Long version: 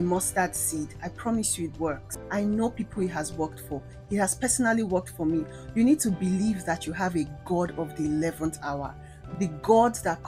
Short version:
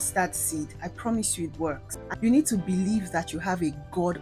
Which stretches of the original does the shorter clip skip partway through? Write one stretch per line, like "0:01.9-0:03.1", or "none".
0:02.2-0:05.6